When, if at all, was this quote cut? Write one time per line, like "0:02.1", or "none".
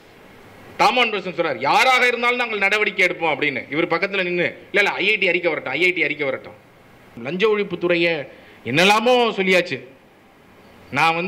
0:07.2